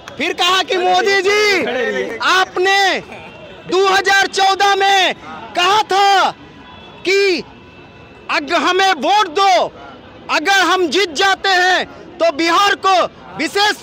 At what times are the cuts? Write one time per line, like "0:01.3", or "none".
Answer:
none